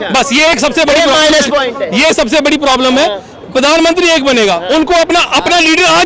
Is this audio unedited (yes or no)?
yes